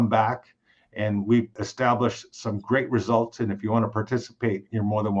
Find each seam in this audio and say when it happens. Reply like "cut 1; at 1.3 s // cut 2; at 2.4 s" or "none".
cut 1; at 1.6 s